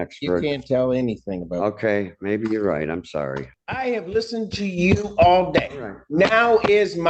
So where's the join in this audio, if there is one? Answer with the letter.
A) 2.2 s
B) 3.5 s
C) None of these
B